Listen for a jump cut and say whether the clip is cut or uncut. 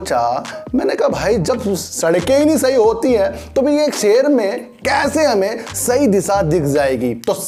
uncut